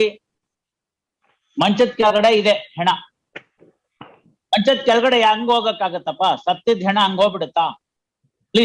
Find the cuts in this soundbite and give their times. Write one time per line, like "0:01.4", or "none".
none